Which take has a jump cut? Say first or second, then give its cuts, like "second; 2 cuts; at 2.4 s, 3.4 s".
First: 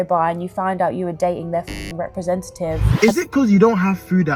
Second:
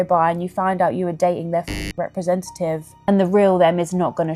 first; 1 cut; at 2.9 s